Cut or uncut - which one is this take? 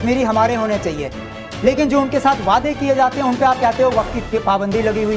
uncut